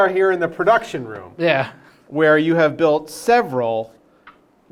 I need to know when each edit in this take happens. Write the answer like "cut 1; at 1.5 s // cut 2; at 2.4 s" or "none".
none